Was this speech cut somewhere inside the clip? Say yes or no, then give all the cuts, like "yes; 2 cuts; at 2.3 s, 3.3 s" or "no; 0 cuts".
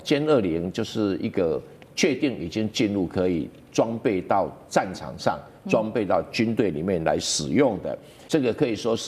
yes; 1 cut; at 8.1 s